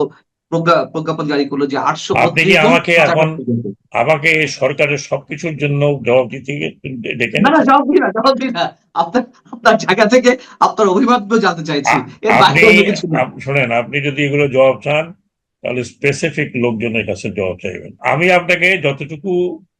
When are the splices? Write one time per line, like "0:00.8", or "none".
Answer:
0:17.9